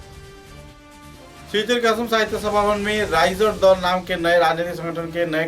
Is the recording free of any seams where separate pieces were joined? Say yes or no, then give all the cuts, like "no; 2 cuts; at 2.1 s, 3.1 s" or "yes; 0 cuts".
no; 1 cut; at 1.3 s